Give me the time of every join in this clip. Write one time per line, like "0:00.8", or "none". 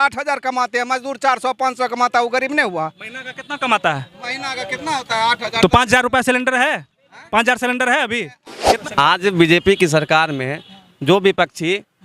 0:08.7